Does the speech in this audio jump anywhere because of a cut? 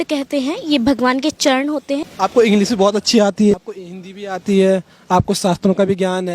yes; 2 cuts; at 2.1 s, 3.5 s

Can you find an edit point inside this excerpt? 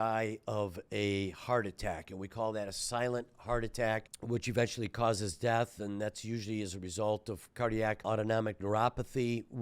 yes; 2 cuts; at 4.1 s, 8.0 s

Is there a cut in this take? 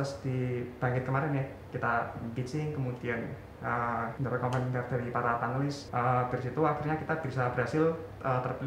yes; 2 cuts; at 4.2 s, 5.8 s

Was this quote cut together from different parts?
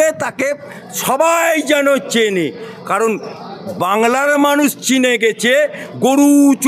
no; 0 cuts

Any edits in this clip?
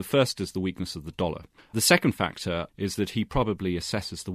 yes; 2 cuts; at 1.7 s, 2.7 s

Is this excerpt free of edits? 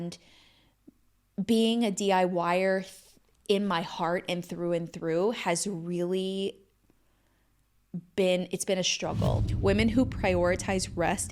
no; 1 cut; at 9.5 s

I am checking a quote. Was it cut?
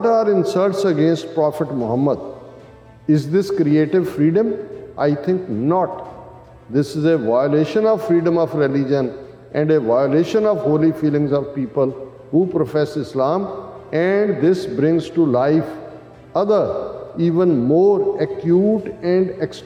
no; 0 cuts

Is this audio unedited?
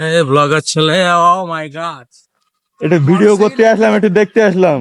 yes; 0 cuts

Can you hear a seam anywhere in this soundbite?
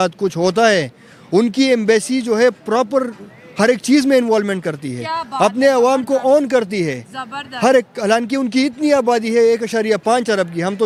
no; 0 cuts

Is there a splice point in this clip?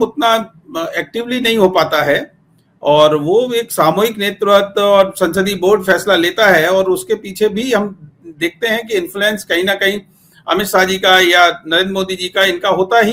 no; 0 cuts

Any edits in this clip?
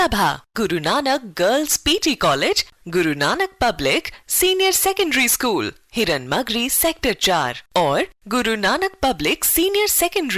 no; 0 cuts

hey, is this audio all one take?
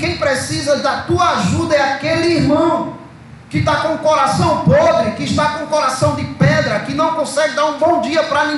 yes; 0 cuts

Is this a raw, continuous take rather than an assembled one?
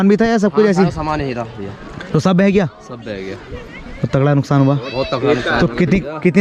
yes; 0 cuts

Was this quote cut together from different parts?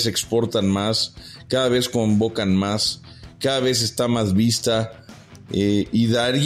no; 0 cuts

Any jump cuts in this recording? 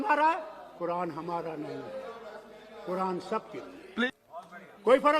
yes; 1 cut; at 4.1 s

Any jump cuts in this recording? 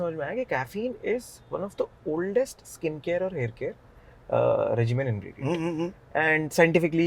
no; 0 cuts

